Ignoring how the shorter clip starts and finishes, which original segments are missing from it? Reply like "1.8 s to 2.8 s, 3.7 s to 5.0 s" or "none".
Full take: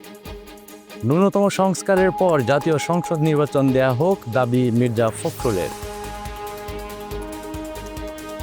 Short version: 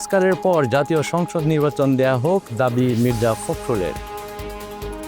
5.7 s to 6.2 s